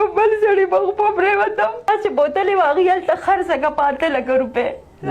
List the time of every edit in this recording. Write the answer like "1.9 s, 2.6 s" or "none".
1.9 s